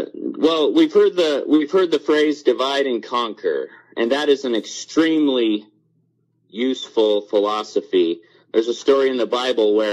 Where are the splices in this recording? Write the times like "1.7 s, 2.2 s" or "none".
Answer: 4.8 s